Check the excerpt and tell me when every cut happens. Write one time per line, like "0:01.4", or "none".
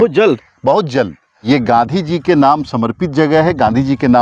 0:01.3

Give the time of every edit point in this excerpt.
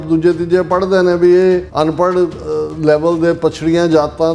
0:01.7

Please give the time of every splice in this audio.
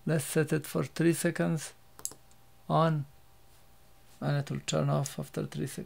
none

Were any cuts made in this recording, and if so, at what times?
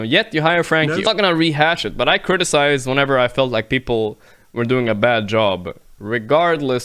0:01.1

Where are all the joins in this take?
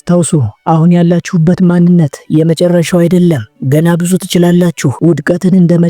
0:04.9

